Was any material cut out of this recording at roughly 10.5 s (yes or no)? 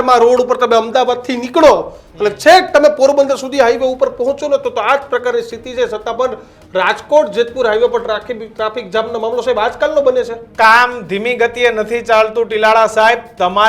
yes